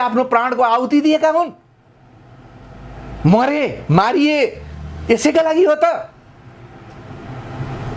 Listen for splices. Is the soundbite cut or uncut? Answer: uncut